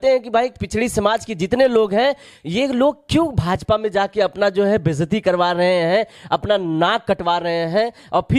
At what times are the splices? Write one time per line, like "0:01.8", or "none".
none